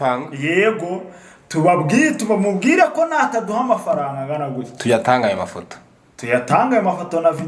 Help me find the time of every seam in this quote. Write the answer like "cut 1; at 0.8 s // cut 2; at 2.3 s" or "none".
none

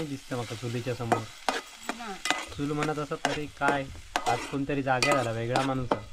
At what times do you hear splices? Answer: none

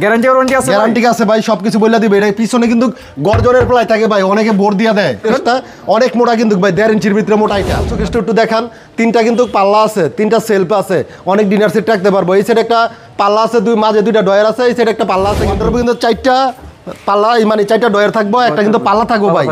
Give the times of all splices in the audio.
cut 1; at 5.2 s // cut 2; at 7.9 s // cut 3; at 15.6 s

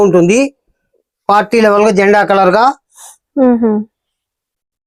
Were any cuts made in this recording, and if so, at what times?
none

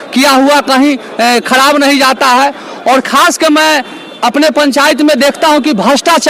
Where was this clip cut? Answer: none

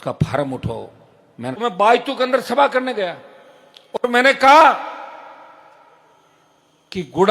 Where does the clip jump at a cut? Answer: cut 1; at 1.6 s

